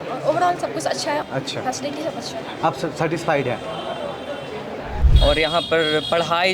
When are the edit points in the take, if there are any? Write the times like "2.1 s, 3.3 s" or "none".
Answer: 1.2 s, 5.0 s